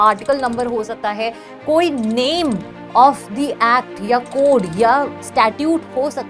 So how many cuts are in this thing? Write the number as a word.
zero